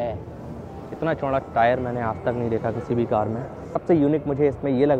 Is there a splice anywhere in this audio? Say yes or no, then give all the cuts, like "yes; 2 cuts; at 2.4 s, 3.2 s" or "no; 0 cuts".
yes; 1 cut; at 3.8 s